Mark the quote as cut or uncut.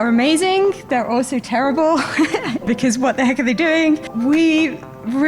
cut